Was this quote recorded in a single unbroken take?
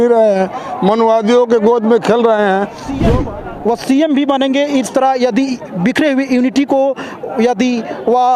no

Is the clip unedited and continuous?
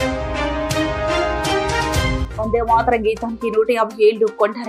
no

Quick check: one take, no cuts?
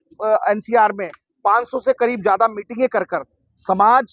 yes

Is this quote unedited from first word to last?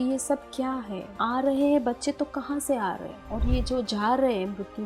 no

